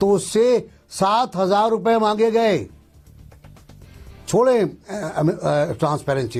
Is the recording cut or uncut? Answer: uncut